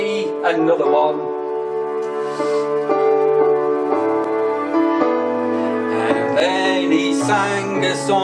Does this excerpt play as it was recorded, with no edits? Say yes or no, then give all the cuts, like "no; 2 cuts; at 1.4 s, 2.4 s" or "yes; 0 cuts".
yes; 0 cuts